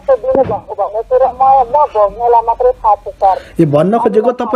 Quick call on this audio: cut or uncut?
uncut